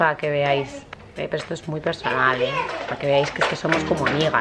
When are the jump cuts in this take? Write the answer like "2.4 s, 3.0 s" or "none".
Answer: none